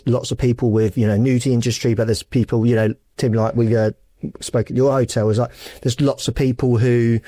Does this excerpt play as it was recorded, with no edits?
yes; 0 cuts

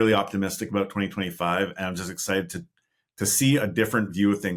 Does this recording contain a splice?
no; 0 cuts

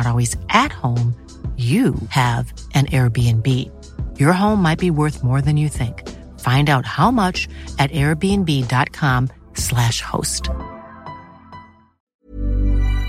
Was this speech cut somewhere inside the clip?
yes; 1 cut; at 12.1 s

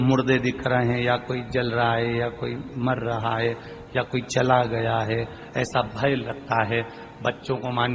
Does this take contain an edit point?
no; 0 cuts

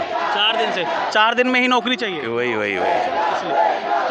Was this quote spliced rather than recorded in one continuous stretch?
no; 0 cuts

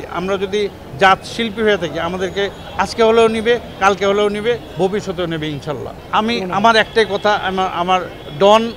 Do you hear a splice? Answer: yes; 1 cut; at 5.9 s

